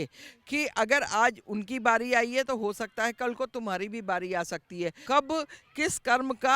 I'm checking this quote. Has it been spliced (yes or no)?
yes